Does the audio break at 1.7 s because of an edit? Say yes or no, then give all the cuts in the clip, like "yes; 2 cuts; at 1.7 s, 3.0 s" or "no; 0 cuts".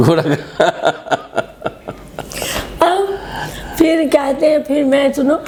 no; 0 cuts